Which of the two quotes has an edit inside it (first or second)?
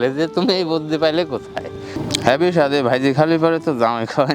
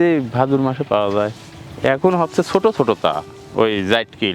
first